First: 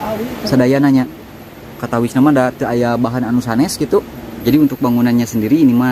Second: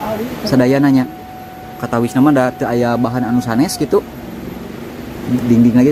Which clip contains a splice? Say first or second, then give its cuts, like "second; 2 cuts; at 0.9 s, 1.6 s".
first; 1 cut; at 4.4 s